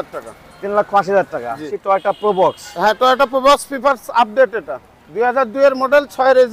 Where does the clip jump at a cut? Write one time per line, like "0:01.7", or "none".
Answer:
0:01.7

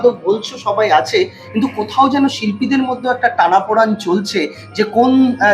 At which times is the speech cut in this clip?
none

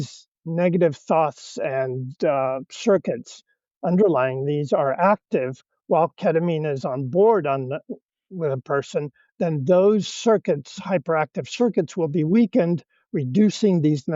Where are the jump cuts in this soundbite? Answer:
none

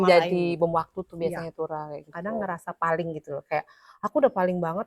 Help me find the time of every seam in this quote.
0:02.1

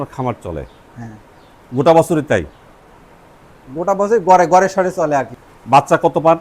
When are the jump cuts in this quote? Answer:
0:05.3

